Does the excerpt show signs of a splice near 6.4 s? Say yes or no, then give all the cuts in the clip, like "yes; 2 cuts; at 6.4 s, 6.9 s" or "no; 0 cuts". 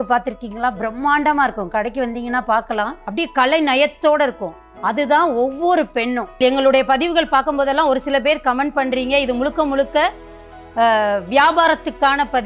yes; 2 cuts; at 3.0 s, 6.4 s